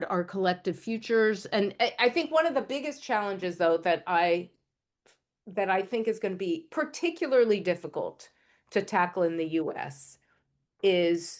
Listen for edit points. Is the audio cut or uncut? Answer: uncut